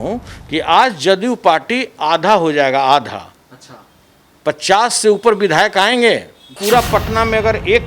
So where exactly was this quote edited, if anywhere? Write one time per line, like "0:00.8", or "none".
0:06.6